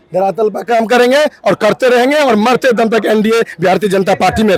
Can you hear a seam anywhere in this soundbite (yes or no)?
no